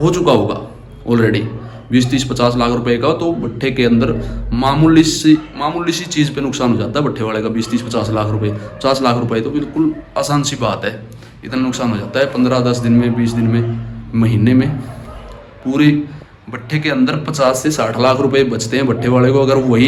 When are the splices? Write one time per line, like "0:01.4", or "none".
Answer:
none